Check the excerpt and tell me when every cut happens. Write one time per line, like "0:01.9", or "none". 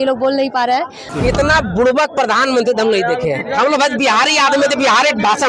0:01.1